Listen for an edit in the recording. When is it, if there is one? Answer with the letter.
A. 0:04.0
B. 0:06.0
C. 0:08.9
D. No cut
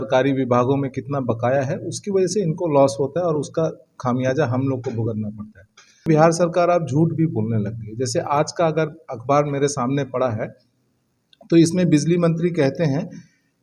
B